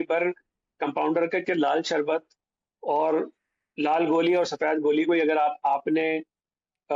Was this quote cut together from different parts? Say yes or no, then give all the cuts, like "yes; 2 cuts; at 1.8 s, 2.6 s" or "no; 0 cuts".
no; 0 cuts